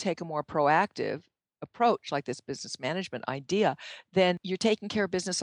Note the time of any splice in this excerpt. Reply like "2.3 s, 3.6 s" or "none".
4.5 s